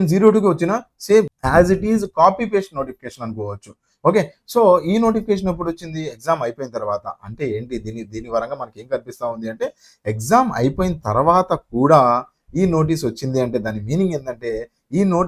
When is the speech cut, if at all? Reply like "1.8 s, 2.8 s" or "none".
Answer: 1.4 s

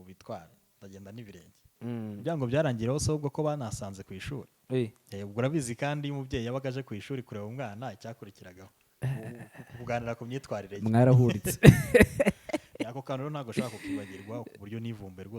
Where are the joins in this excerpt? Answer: 1.6 s

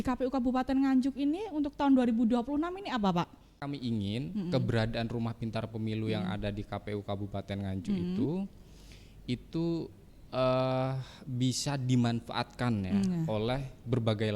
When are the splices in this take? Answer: 3.7 s

